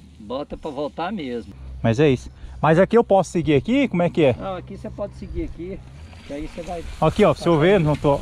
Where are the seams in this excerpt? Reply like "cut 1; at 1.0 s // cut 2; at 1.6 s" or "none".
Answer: none